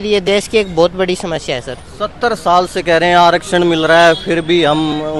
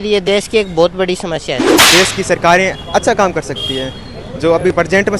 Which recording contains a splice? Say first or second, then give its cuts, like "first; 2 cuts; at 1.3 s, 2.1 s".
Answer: second; 1 cut; at 1.7 s